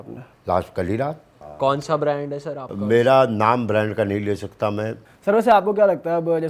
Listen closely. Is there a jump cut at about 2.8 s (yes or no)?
no